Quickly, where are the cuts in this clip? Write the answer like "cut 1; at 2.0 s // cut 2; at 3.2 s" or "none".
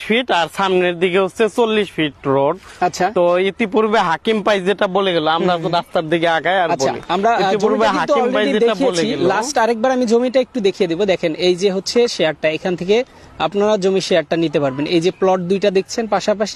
none